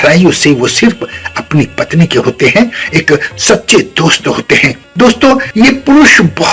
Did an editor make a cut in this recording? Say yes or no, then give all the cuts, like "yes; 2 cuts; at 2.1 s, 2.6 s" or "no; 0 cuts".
yes; 2 cuts; at 4.8 s, 5.5 s